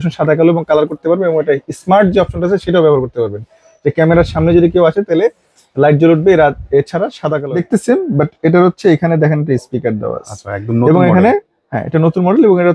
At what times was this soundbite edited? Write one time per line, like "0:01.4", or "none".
0:07.4